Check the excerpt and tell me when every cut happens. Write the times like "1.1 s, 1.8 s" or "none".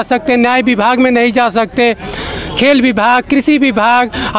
none